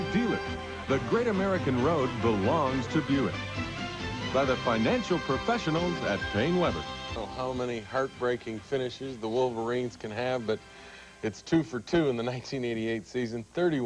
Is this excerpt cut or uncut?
uncut